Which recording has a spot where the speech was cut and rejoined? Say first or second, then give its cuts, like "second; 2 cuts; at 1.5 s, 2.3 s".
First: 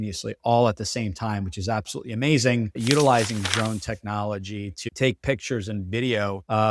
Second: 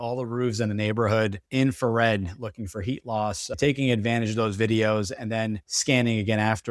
first; 1 cut; at 2.7 s